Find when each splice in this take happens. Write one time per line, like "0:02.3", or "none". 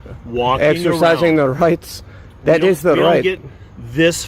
none